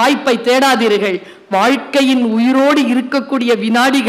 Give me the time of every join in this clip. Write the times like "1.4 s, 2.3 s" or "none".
none